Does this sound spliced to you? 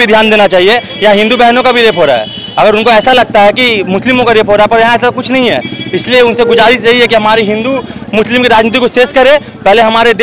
no; 0 cuts

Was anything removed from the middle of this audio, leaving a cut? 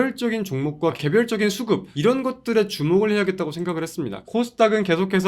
yes; 2 cuts; at 1.9 s, 4.2 s

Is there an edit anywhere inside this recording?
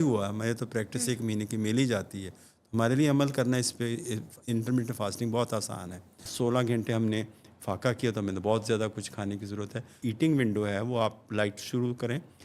yes; 2 cuts; at 6.2 s, 10.0 s

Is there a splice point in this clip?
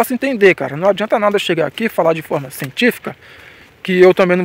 no; 0 cuts

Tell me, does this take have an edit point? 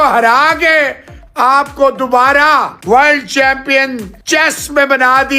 yes; 2 cuts; at 2.7 s, 4.1 s

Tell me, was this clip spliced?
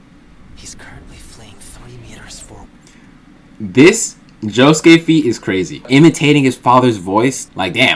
no; 0 cuts

